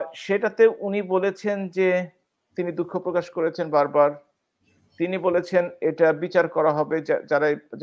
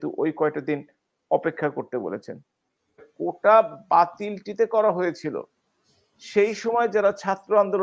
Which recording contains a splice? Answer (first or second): second